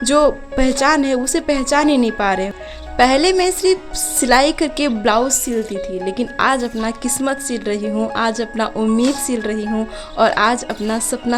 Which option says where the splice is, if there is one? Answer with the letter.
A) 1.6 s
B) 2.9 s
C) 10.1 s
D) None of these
B